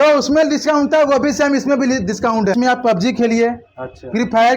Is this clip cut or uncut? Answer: cut